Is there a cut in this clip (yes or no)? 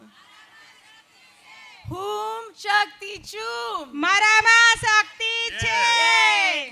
no